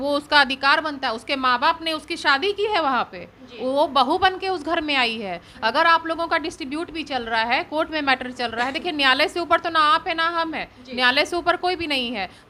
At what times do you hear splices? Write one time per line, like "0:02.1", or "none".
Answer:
none